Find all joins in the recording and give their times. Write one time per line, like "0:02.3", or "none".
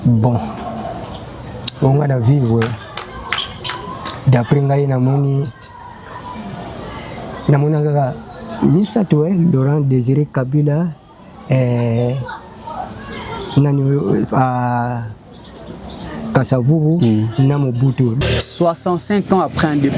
0:18.2

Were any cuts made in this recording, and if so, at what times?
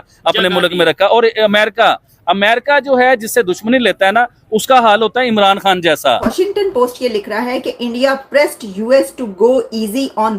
0:06.3

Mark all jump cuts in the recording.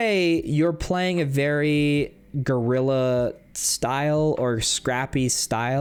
none

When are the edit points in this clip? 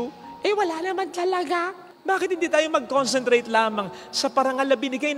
none

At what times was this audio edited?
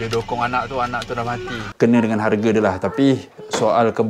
0:01.6

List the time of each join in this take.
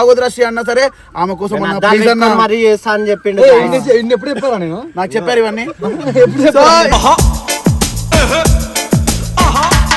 none

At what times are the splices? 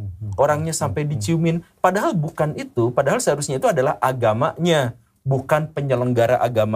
none

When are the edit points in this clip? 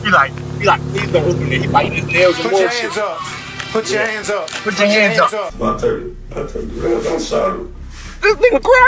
0:05.5

